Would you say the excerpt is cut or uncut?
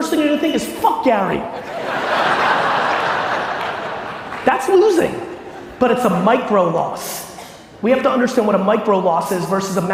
uncut